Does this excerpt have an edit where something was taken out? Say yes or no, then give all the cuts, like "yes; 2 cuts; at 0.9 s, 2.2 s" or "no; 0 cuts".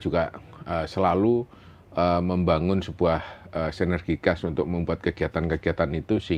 no; 0 cuts